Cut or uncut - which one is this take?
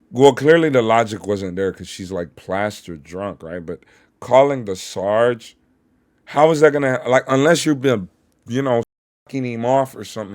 uncut